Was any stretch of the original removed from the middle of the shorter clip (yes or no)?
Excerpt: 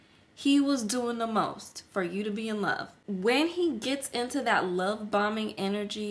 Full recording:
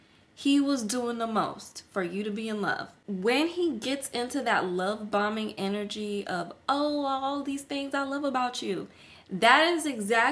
no